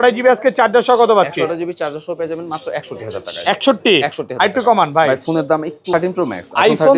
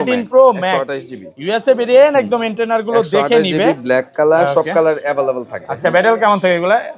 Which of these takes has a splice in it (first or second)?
first